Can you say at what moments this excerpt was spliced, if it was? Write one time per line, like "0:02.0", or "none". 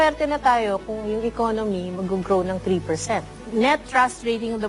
0:03.4